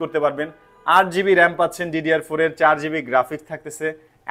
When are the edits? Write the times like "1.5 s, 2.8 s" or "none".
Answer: none